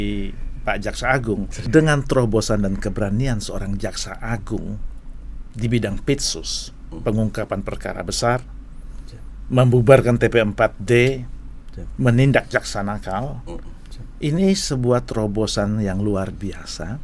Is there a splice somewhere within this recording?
yes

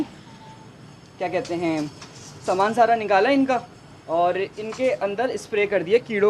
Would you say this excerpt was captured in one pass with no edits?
yes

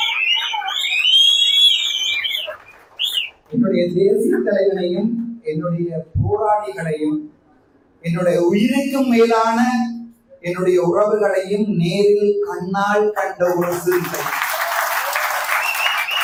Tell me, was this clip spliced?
no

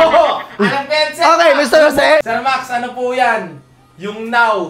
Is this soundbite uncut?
no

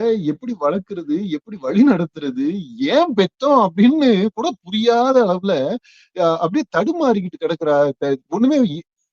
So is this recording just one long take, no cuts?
yes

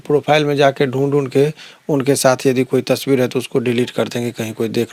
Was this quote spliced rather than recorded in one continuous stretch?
no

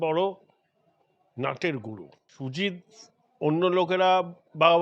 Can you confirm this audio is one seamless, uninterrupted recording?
no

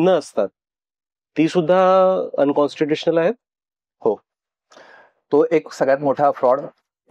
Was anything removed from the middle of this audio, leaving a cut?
no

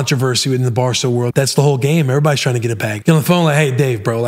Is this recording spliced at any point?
yes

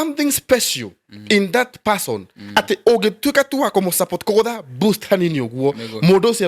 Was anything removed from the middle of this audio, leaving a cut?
no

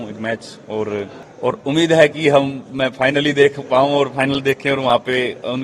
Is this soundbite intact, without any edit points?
no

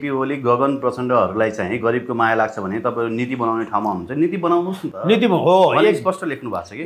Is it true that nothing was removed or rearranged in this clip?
yes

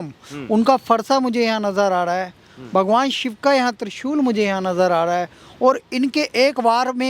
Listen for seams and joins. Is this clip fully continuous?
yes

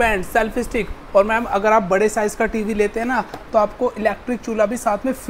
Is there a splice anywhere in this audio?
no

